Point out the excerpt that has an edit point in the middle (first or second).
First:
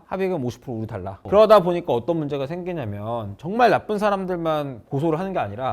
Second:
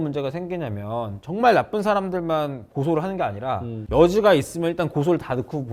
first